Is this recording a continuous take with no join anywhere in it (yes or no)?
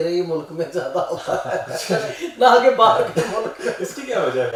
yes